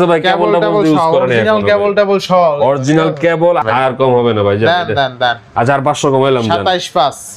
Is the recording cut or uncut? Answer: cut